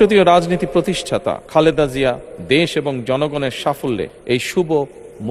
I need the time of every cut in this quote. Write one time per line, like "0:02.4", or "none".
0:01.4
0:04.1

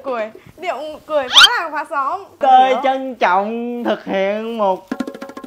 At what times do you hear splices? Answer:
0:02.4

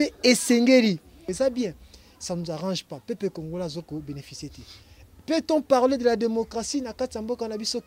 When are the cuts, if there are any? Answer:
0:01.2

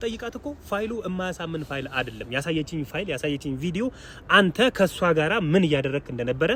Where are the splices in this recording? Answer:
none

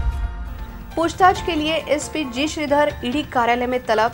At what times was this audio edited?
none

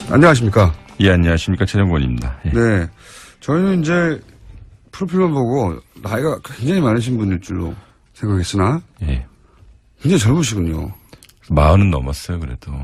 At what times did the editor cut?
none

